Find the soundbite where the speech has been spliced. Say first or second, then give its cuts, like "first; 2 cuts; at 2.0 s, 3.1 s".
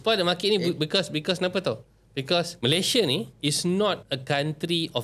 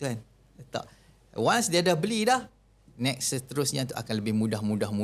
first; 3 cuts; at 2.5 s, 3.3 s, 4.1 s